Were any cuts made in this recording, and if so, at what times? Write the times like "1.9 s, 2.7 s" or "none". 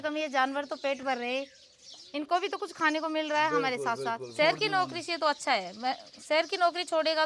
4.2 s